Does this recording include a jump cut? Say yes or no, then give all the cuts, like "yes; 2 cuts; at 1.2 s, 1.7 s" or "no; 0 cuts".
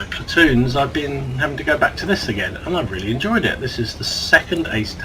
yes; 1 cut; at 1.6 s